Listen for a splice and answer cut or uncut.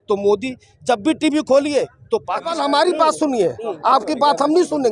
cut